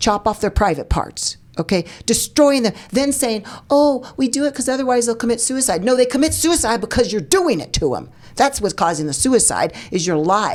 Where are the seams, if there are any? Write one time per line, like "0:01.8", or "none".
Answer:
none

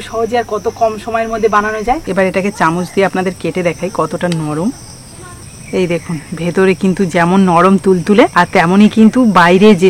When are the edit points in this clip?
0:02.0
0:08.3

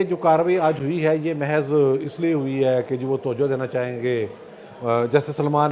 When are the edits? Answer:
none

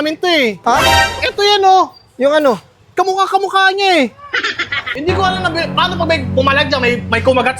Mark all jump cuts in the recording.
0:05.0

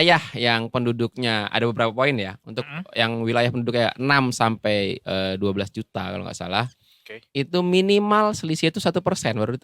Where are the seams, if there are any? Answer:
none

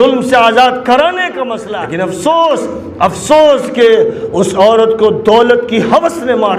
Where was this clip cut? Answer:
0:01.6

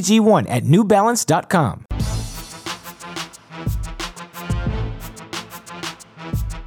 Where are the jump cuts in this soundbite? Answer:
0:01.8
0:04.4

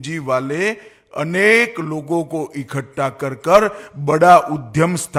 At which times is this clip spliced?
none

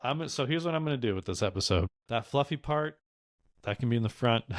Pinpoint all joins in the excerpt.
0:02.0

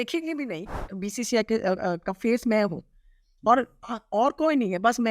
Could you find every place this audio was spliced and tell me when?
0:01.0

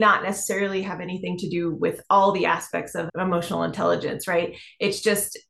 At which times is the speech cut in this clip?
0:03.1

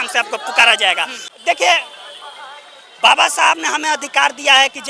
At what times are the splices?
0:01.2

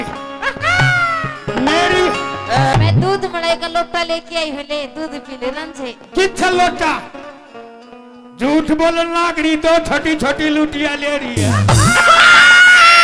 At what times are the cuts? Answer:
0:02.7
0:11.9

